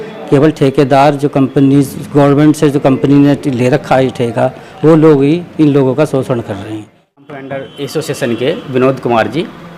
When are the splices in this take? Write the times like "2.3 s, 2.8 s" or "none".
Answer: 7.2 s